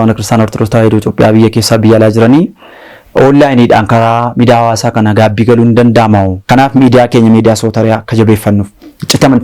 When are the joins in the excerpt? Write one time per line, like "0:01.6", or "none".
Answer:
0:06.4